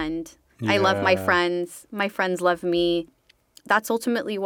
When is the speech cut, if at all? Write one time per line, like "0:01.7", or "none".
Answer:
0:03.1